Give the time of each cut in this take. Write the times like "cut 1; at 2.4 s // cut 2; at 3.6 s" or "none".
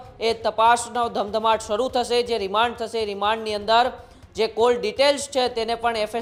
none